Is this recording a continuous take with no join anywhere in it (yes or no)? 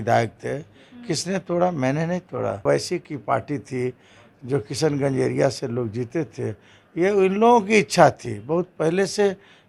no